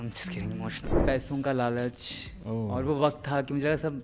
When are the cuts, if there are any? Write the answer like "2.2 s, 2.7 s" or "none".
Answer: 1.0 s